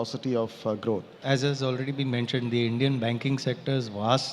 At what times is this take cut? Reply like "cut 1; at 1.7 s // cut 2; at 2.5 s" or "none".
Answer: cut 1; at 1.1 s